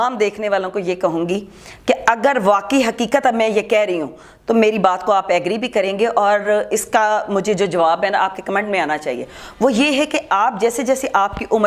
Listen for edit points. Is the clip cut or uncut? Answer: uncut